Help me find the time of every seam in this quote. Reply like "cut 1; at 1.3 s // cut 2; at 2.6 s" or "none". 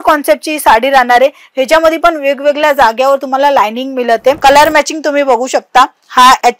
cut 1; at 4.4 s